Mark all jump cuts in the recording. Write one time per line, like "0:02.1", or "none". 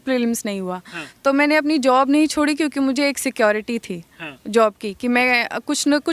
none